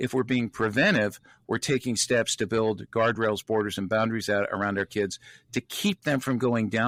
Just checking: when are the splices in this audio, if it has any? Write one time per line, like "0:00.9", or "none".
none